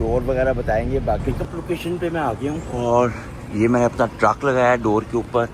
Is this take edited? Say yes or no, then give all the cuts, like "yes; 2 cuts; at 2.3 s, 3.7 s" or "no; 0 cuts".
yes; 1 cut; at 1.3 s